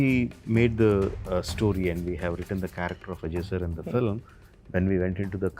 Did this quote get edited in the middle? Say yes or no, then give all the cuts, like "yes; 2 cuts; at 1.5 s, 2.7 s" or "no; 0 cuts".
no; 0 cuts